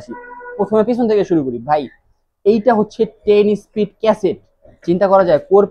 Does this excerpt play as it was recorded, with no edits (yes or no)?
yes